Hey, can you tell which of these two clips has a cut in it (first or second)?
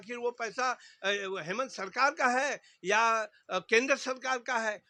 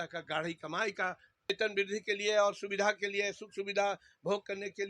second